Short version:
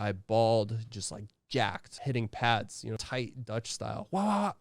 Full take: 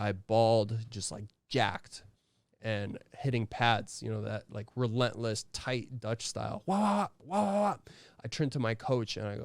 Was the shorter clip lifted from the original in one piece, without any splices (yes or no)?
no